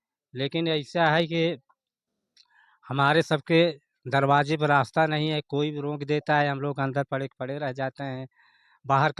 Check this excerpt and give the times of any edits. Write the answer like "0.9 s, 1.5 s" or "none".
none

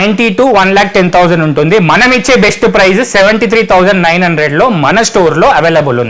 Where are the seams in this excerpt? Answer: none

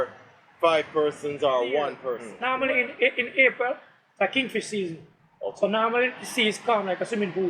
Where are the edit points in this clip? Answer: 2.3 s

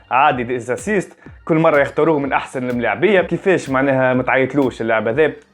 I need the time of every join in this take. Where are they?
3.3 s

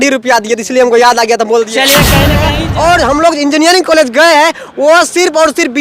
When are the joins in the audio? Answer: 2.5 s

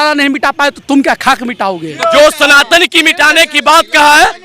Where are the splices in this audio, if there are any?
2.1 s

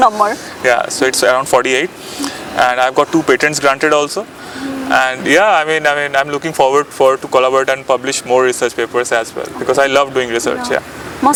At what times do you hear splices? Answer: none

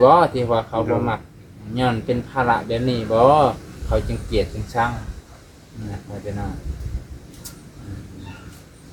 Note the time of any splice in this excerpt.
none

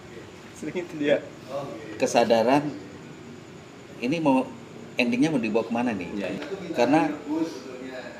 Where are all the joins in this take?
6.3 s

